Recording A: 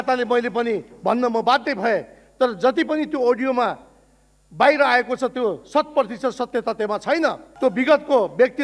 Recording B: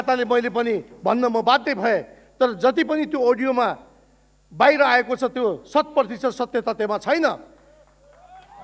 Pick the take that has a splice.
A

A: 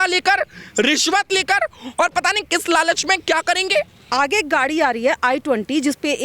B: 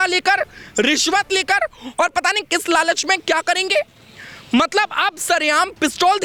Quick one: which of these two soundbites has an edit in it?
A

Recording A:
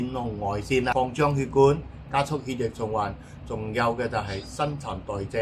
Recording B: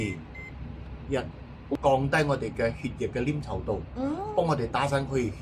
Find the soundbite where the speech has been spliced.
B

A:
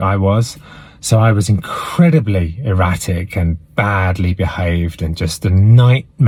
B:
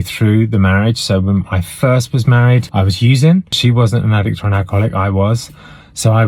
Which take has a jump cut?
B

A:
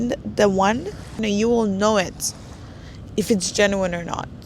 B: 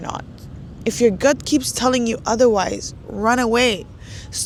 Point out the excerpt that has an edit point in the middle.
A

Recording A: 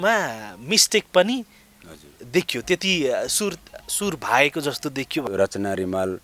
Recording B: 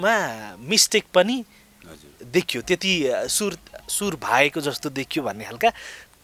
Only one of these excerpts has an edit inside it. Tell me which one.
A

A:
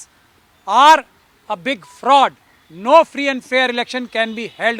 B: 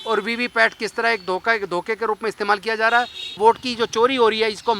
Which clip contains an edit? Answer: B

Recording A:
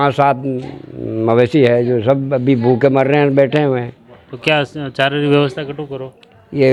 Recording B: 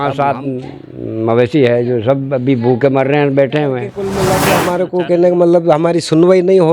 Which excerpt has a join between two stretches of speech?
B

